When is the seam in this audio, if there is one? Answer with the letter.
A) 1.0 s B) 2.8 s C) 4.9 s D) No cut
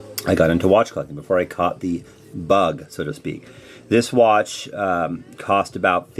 D